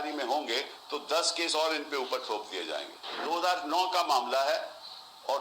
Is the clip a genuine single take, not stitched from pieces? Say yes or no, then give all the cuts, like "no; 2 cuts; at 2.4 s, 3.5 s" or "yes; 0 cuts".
no; 1 cut; at 3.2 s